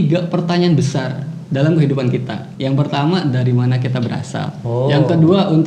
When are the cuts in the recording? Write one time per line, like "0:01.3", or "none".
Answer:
0:02.4
0:04.6